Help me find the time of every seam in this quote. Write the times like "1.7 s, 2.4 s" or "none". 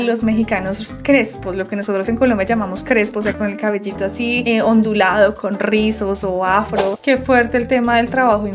7.0 s